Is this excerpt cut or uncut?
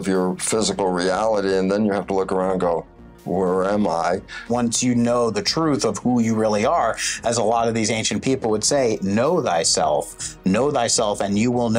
cut